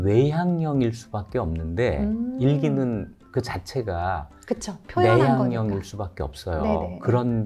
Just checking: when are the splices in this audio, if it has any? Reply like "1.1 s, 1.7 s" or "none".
none